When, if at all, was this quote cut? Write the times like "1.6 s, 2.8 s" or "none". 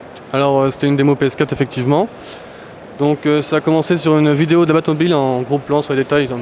none